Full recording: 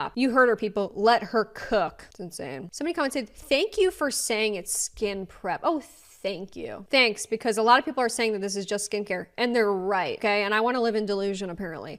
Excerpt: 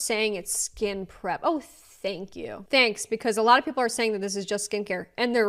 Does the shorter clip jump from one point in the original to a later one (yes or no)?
no